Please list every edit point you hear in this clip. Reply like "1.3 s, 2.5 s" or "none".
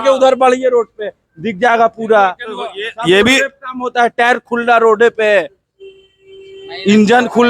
none